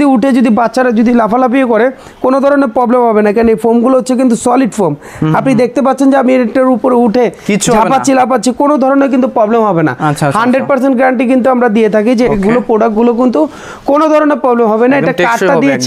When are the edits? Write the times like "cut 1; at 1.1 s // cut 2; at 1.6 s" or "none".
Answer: none